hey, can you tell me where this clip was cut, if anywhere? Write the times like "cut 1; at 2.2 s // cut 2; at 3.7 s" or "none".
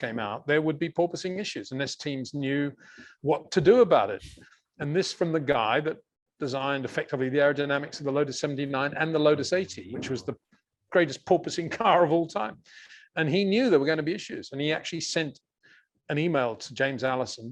none